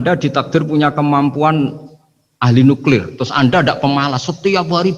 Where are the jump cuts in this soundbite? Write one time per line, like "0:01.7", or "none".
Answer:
none

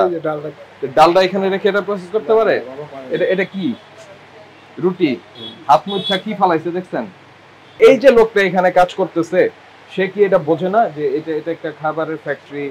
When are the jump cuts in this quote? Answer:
none

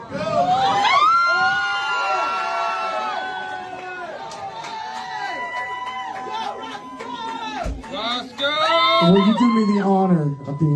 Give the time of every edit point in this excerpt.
none

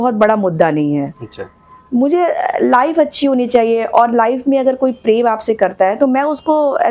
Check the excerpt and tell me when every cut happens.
none

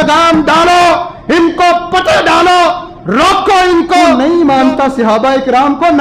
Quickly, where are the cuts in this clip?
0:04.1

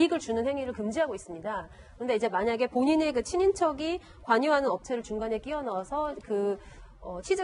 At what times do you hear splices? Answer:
0:04.0

